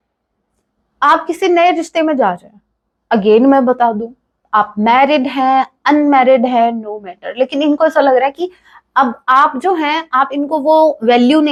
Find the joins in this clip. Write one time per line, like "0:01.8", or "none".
none